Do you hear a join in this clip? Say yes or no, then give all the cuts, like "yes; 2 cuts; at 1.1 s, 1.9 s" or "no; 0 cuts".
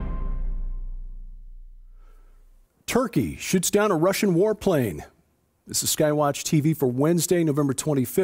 no; 0 cuts